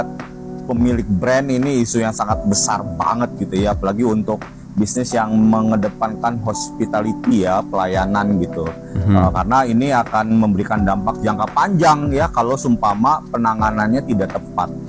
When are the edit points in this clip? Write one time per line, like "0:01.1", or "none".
none